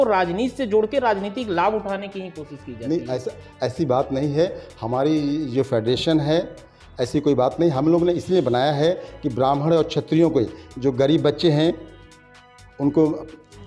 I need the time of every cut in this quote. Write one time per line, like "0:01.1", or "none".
none